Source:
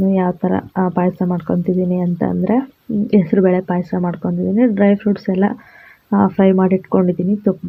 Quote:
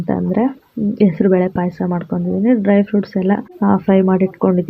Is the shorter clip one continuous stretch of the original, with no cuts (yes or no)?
no